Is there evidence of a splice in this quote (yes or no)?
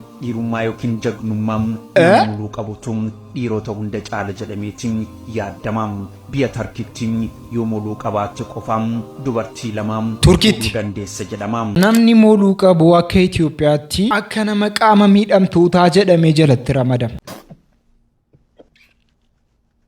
yes